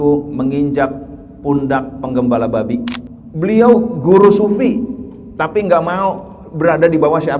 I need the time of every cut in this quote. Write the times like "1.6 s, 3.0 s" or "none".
3.0 s